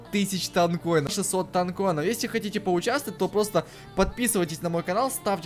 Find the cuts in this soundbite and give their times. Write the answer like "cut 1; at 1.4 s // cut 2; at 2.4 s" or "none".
cut 1; at 1.1 s